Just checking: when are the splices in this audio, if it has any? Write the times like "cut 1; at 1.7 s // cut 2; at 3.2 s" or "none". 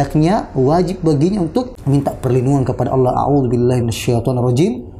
cut 1; at 1.8 s